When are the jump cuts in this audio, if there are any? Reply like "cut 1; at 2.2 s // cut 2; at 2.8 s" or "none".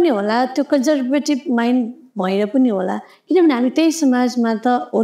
none

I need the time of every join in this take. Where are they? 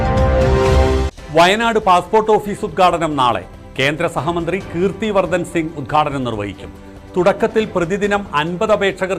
cut 1; at 1.0 s

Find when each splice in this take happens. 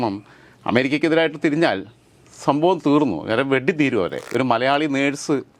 cut 1; at 4.2 s

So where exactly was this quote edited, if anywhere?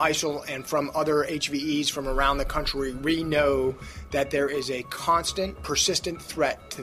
none

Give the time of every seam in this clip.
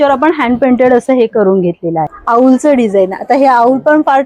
cut 1; at 2.2 s

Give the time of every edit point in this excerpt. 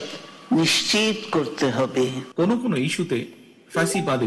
cut 1; at 2.2 s

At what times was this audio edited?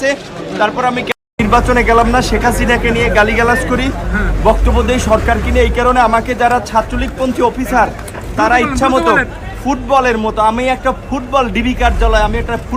none

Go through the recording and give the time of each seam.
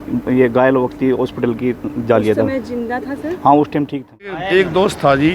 cut 1; at 4.4 s

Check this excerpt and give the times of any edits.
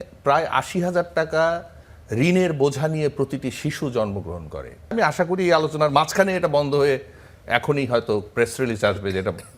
cut 1; at 4.9 s

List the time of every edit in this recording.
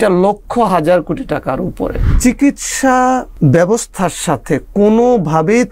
cut 1; at 2.0 s // cut 2; at 3.3 s

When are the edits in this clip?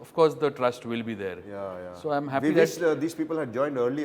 none

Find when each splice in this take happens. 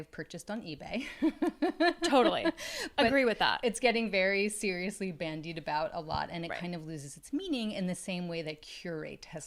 none

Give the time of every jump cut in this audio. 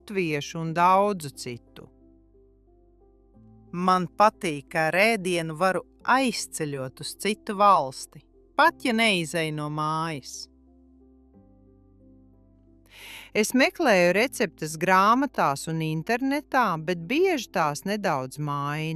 none

